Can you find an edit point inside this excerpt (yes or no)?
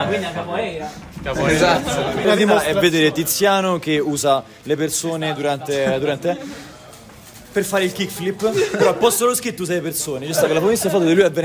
yes